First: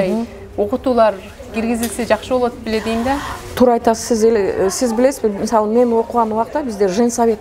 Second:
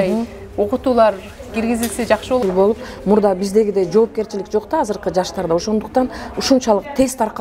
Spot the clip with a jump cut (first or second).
second